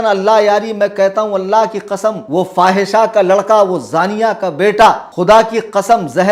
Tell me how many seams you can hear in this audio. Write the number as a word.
two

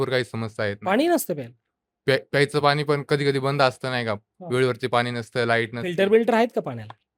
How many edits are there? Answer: zero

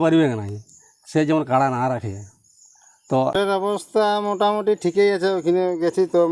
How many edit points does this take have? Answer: one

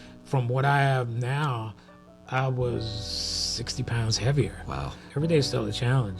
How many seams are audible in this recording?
one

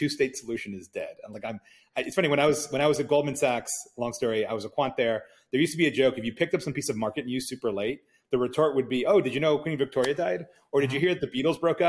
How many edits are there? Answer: zero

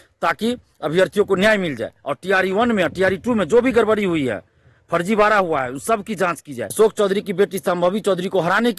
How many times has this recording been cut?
one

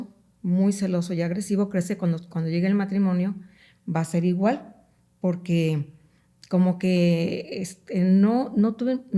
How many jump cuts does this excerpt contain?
zero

